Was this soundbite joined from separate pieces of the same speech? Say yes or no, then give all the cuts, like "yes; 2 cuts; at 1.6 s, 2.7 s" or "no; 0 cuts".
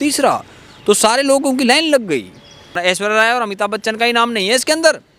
yes; 1 cut; at 2.7 s